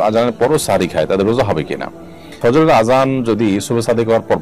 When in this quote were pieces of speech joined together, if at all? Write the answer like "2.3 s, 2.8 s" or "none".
none